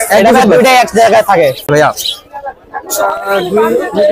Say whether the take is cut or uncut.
cut